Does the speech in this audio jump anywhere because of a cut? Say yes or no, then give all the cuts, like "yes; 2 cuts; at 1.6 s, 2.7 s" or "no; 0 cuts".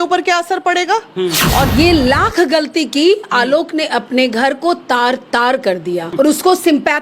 yes; 2 cuts; at 1.7 s, 6.1 s